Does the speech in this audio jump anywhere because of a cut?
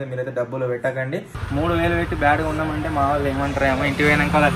yes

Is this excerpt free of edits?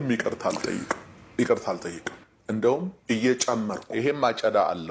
no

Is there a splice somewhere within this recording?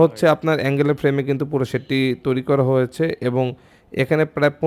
no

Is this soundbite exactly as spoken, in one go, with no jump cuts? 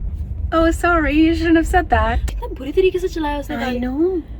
no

